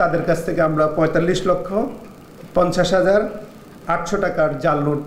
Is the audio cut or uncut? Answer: uncut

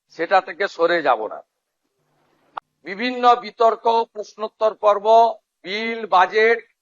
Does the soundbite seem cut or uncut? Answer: cut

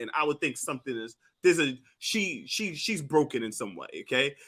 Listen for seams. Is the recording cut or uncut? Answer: uncut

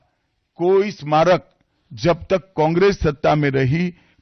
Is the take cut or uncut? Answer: uncut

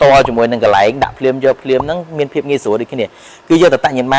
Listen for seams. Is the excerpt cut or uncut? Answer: uncut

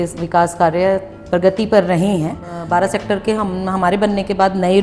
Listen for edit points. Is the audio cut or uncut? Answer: cut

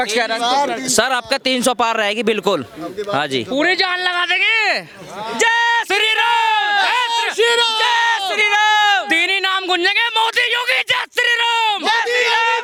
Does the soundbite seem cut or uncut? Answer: uncut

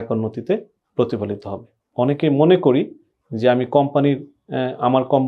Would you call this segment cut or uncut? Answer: cut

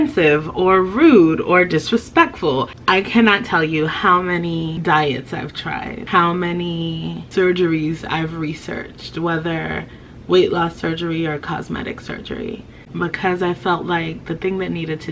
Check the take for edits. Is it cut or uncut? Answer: cut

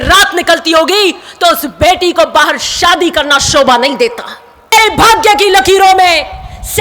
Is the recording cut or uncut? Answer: cut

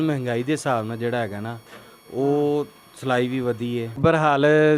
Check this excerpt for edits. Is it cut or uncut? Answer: cut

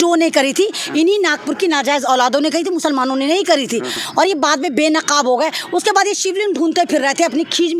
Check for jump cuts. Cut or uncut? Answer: uncut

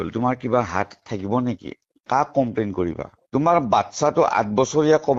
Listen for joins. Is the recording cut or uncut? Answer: uncut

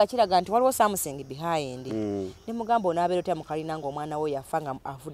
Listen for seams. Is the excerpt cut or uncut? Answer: uncut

